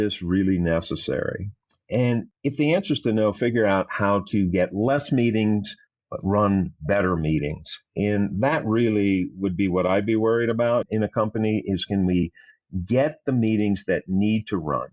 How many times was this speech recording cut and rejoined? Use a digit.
2